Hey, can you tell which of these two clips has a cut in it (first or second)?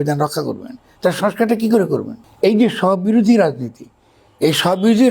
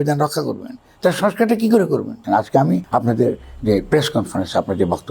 second